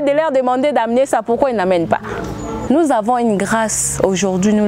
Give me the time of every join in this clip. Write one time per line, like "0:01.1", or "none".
0:02.5